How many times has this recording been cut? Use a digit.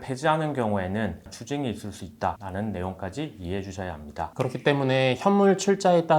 1